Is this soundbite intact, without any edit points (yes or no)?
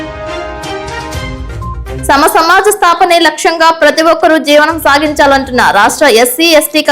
no